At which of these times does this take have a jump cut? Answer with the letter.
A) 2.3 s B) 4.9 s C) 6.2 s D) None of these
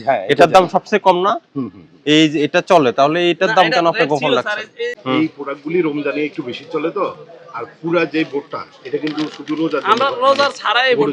B